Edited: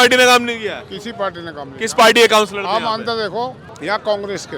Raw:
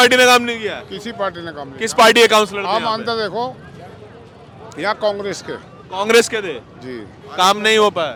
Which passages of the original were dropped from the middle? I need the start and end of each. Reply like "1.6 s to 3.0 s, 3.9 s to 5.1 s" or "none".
3.7 s to 4.6 s

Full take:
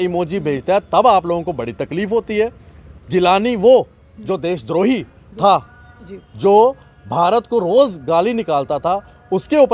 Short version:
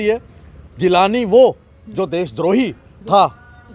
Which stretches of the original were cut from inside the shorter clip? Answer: none

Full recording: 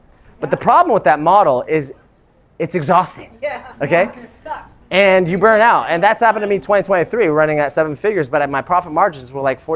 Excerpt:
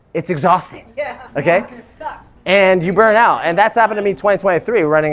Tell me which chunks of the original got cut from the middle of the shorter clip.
none

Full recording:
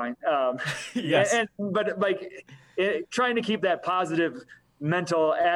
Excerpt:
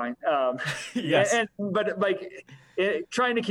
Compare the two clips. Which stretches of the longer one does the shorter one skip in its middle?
none

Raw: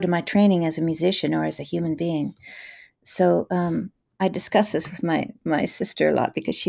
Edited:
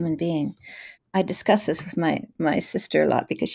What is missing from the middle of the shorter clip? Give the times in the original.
2.7 s to 4.0 s

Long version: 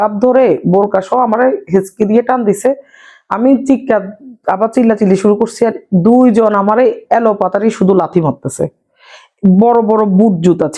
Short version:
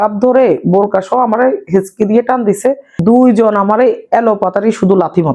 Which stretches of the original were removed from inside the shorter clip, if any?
2.9 s to 5.9 s

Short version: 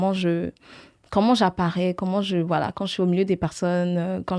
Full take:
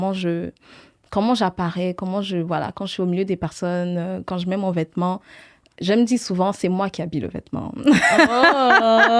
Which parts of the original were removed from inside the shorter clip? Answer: none

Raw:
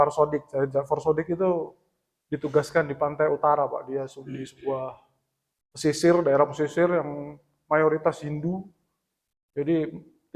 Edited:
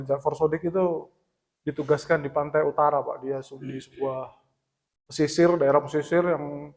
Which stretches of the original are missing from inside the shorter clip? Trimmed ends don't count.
none

